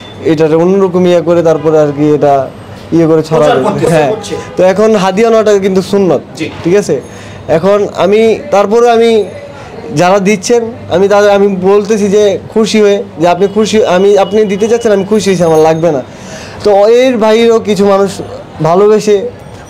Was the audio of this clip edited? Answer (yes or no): no